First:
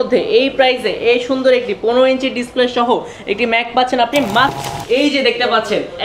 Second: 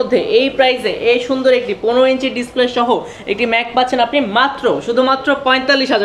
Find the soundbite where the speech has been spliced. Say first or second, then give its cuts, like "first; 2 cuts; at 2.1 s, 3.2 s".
first; 1 cut; at 4.6 s